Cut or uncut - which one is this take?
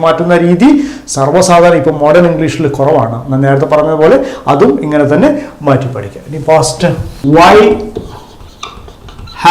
cut